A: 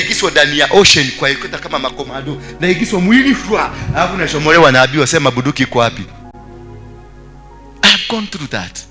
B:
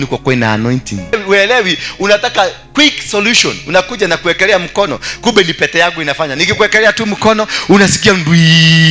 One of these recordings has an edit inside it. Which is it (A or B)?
B